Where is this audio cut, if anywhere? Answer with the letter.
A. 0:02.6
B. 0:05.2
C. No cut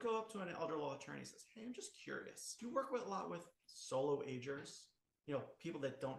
A